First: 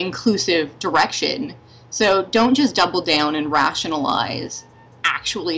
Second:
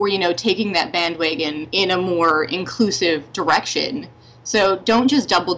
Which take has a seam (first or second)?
second